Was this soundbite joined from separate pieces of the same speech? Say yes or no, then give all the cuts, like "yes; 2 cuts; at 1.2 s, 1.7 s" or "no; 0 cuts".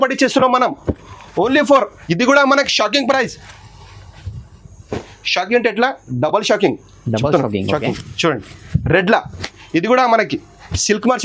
yes; 1 cut; at 2.0 s